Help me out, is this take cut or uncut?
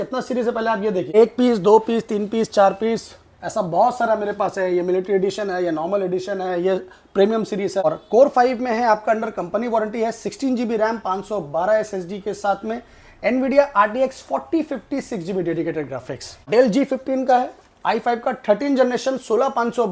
cut